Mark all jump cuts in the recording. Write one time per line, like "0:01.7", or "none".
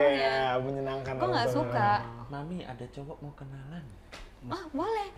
none